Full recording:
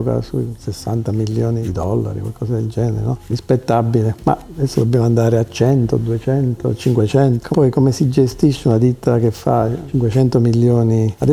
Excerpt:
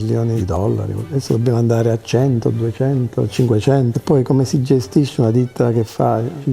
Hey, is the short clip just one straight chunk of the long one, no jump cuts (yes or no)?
no